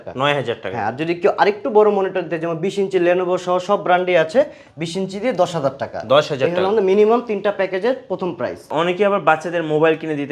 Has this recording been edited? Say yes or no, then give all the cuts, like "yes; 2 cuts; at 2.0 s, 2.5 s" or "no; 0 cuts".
yes; 1 cut; at 8.7 s